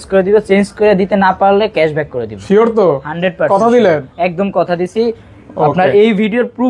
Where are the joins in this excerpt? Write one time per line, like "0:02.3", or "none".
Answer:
none